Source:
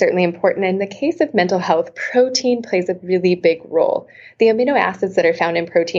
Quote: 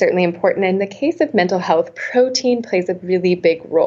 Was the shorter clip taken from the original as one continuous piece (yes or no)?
yes